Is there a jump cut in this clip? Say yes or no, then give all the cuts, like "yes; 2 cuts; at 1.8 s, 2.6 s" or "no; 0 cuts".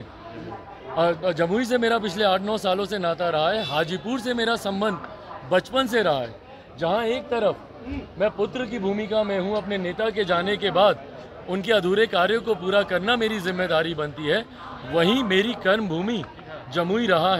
no; 0 cuts